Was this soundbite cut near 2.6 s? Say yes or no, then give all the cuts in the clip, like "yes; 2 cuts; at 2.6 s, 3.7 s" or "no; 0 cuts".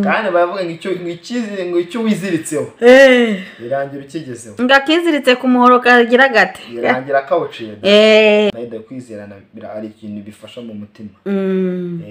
no; 1 cut; at 8.5 s